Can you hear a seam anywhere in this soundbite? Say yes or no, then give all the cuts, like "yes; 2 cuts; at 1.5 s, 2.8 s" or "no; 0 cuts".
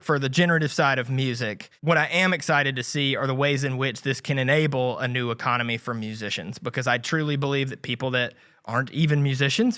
yes; 1 cut; at 1.7 s